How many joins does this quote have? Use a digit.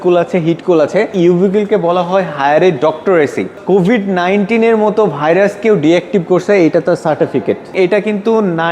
3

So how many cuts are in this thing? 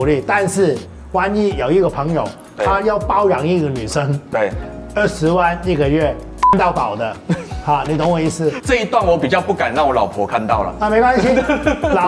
1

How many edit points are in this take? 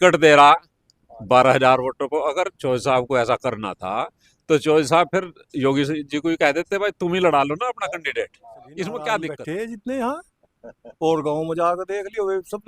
1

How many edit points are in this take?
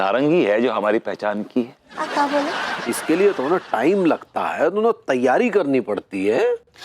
1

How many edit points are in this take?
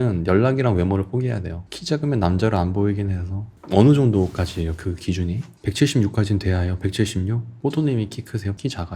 0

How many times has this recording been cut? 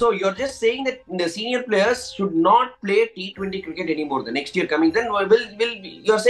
0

